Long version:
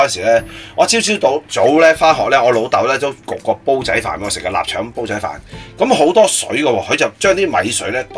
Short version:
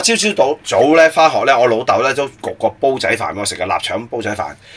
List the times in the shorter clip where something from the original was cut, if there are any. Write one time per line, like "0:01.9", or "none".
none